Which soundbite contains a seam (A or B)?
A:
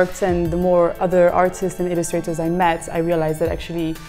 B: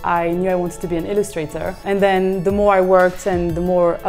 B